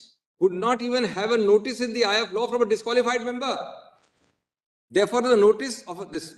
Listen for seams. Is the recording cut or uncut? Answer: uncut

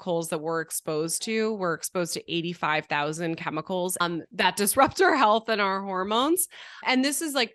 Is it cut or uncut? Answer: cut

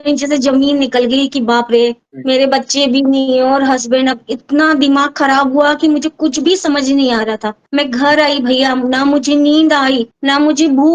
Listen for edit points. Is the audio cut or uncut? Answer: uncut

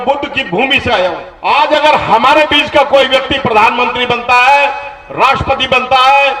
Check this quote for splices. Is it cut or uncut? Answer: cut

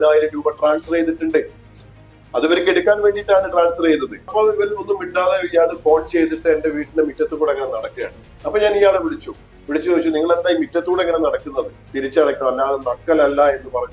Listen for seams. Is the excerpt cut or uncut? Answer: cut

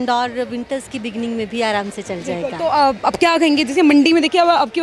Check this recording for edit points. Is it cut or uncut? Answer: uncut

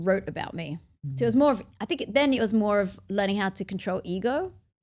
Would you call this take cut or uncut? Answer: uncut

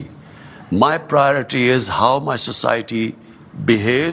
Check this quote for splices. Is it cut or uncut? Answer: uncut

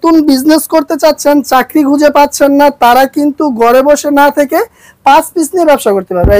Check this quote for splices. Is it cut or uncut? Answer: uncut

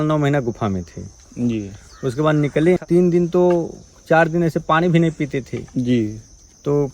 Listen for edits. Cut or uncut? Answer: cut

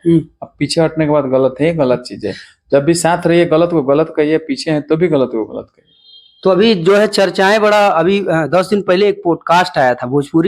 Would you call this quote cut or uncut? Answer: uncut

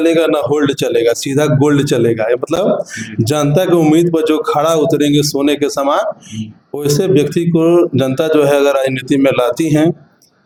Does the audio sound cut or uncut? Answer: uncut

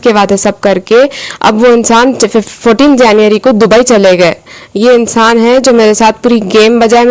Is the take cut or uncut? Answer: uncut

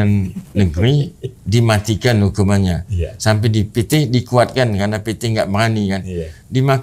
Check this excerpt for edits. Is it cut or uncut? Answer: uncut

